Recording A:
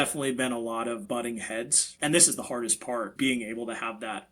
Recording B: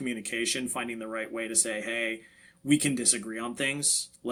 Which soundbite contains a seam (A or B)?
A